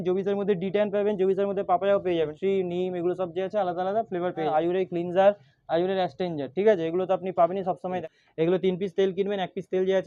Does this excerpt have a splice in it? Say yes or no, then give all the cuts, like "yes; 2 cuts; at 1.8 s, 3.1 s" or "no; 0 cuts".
yes; 3 cuts; at 2.3 s, 4.5 s, 8.0 s